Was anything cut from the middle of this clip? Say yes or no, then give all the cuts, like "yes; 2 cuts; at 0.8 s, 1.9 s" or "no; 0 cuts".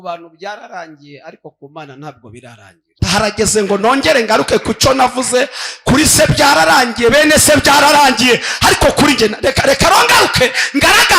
yes; 1 cut; at 2.9 s